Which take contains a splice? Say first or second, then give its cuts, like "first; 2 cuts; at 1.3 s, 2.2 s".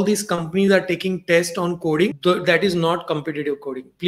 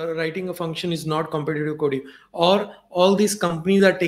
first; 1 cut; at 2.2 s